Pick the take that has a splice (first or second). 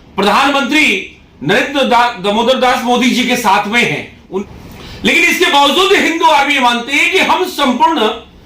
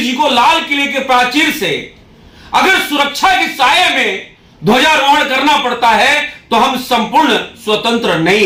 first